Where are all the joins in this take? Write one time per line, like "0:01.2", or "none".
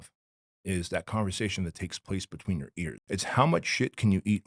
0:02.9